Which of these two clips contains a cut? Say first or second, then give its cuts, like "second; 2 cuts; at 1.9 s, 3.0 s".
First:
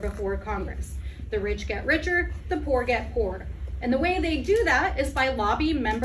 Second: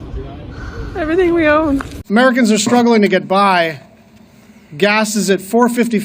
second; 1 cut; at 2.0 s